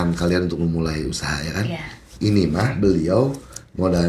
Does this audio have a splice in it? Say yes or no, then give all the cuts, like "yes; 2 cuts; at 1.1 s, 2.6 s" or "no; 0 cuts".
no; 0 cuts